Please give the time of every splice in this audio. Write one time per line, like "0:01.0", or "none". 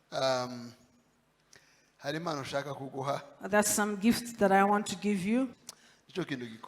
0:05.6